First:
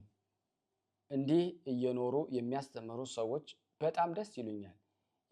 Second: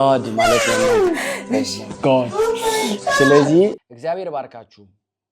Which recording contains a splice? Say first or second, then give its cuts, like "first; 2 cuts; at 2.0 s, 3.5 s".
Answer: second; 1 cut; at 3.8 s